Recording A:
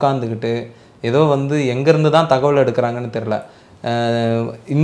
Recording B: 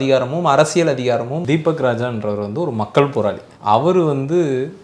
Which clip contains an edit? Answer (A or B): B